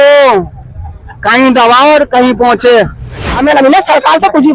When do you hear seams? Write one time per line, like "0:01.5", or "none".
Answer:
0:03.2